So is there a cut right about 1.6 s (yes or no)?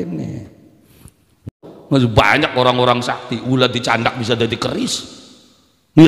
yes